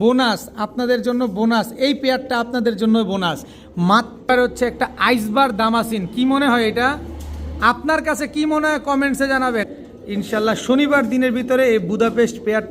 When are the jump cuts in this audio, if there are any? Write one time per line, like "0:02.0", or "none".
0:04.3
0:09.7